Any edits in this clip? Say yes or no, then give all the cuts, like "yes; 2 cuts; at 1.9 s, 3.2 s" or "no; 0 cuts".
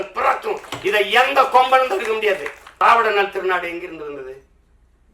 yes; 1 cut; at 2.8 s